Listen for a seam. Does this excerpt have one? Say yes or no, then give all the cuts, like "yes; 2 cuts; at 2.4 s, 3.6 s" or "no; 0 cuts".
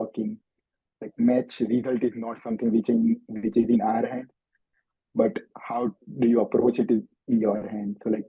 no; 0 cuts